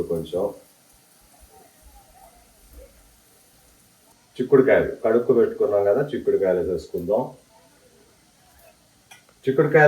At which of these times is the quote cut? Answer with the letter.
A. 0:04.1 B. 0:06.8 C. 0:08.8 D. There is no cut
A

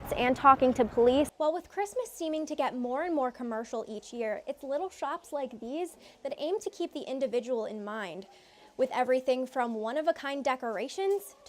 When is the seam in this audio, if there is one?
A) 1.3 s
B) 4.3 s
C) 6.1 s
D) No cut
A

